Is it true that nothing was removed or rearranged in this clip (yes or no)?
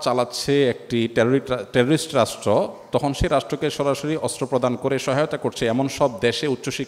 yes